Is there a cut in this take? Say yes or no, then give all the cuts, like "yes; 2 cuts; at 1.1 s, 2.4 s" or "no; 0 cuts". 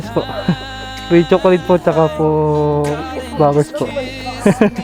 no; 0 cuts